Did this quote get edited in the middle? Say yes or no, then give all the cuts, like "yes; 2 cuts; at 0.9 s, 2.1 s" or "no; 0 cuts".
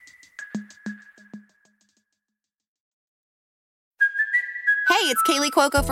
no; 0 cuts